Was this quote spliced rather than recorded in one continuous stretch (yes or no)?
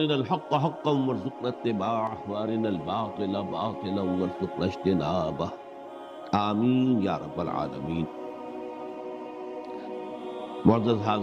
no